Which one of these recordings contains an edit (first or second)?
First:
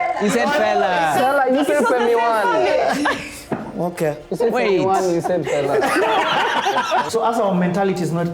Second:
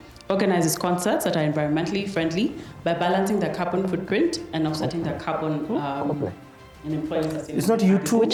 first